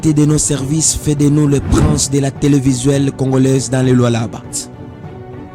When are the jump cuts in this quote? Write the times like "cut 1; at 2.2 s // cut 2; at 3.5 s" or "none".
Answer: cut 1; at 4.6 s